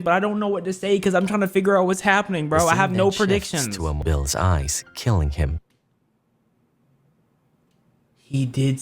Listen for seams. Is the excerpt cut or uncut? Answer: cut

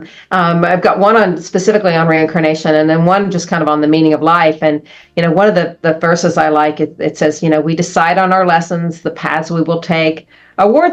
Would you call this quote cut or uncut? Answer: uncut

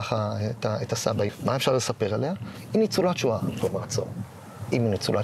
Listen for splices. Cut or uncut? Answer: cut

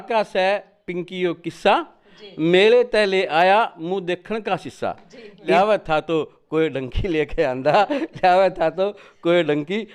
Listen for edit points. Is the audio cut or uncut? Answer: cut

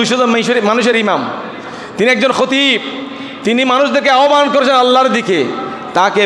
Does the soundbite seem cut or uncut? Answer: uncut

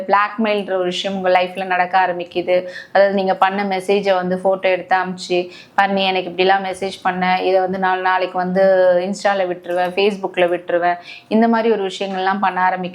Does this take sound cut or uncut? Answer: uncut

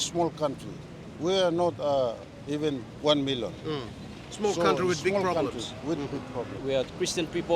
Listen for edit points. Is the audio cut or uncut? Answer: cut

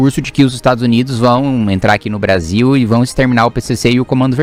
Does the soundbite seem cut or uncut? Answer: uncut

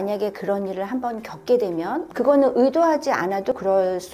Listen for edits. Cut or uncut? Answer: cut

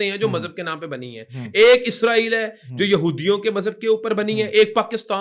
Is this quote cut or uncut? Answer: uncut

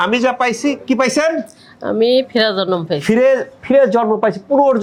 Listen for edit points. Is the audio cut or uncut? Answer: uncut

